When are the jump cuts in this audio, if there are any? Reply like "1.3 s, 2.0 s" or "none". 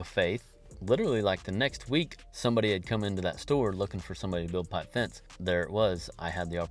2.1 s, 5.3 s